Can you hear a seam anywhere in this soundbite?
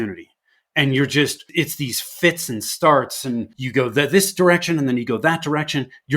yes; 2 cuts; at 1.5 s, 3.6 s

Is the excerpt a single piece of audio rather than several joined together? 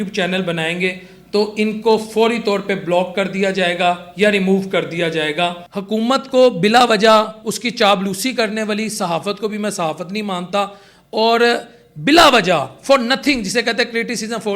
no; 1 cut; at 5.7 s

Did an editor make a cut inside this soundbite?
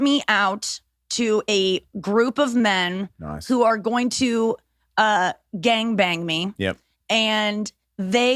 no; 0 cuts

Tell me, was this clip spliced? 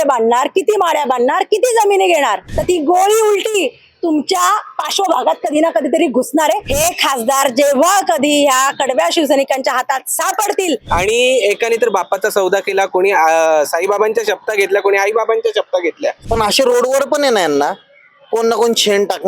yes; 4 cuts; at 2.5 s, 6.7 s, 10.8 s, 16.2 s

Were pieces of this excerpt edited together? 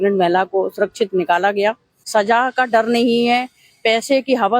yes; 1 cut; at 1.9 s

